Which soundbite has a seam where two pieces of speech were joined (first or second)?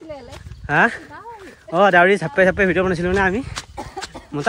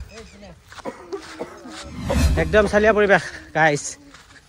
second